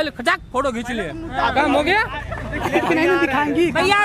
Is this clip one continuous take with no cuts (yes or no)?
no